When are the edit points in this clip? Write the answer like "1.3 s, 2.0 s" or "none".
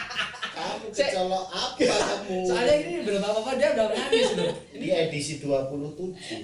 4.7 s